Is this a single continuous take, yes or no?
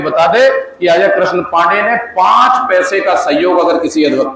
yes